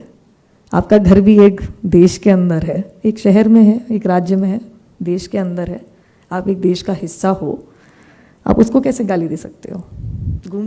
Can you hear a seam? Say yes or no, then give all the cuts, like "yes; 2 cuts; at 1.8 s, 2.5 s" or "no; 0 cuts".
no; 0 cuts